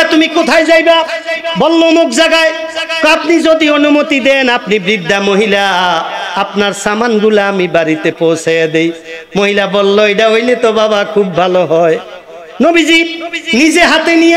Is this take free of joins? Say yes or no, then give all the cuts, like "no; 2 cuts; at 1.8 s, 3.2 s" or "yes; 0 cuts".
yes; 0 cuts